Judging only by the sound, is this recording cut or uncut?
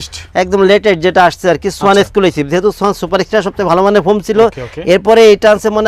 uncut